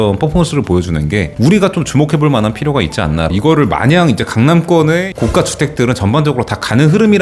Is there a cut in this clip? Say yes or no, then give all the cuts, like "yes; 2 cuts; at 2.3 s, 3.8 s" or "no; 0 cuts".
yes; 1 cut; at 3.3 s